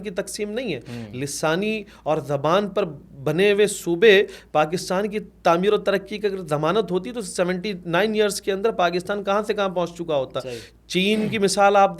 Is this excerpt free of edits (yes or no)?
yes